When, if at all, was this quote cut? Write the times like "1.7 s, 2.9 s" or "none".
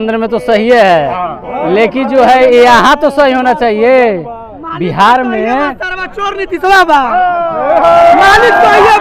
none